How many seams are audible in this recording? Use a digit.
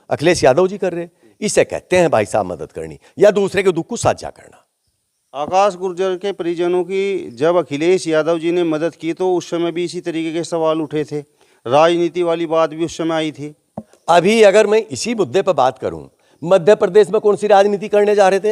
0